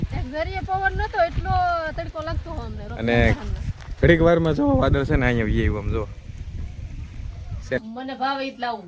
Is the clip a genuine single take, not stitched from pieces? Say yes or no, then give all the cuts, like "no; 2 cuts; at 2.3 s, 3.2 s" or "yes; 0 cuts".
no; 1 cut; at 7.8 s